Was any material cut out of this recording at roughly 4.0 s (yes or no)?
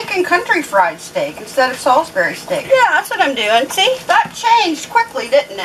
yes